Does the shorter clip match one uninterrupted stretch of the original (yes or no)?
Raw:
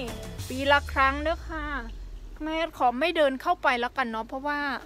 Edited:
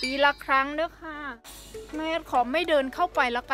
yes